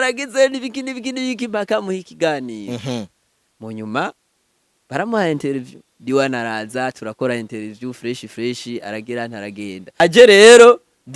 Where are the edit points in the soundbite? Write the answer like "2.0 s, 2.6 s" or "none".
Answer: 10.0 s